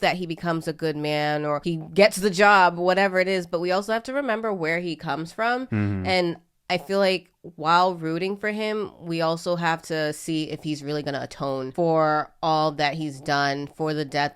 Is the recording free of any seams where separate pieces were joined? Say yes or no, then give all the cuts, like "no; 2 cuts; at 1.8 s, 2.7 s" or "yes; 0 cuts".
no; 2 cuts; at 1.6 s, 11.7 s